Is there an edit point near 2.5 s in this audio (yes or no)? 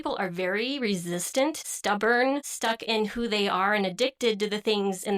yes